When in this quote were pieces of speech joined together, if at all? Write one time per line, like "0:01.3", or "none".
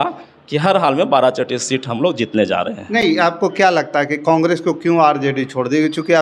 none

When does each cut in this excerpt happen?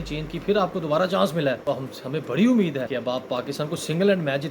0:01.6
0:02.9

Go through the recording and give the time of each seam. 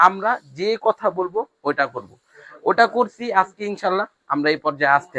none

